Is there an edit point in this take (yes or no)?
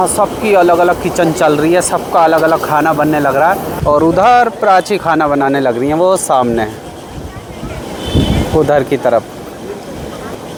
no